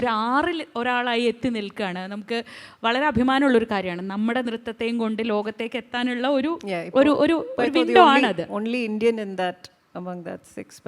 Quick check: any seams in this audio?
no; 0 cuts

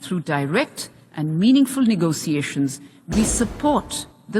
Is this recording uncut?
no; 1 cut; at 2.9 s

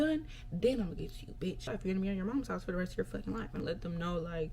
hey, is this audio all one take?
no; 2 cuts; at 1.7 s, 3.6 s

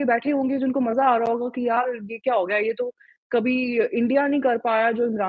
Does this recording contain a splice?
no; 0 cuts

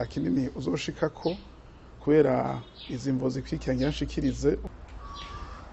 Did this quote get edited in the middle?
yes; 1 cut; at 4.6 s

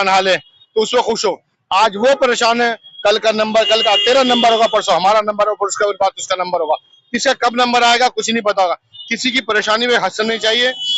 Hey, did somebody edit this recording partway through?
no; 0 cuts

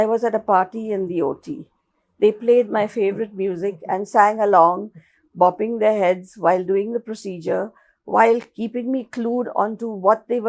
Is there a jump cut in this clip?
no; 0 cuts

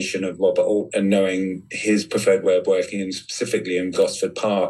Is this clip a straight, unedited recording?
yes; 0 cuts

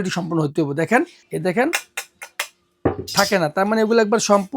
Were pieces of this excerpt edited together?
yes; 1 cut; at 1.2 s

